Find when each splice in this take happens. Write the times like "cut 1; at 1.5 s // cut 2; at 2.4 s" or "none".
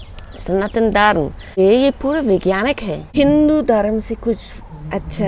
cut 1; at 1.5 s // cut 2; at 2.9 s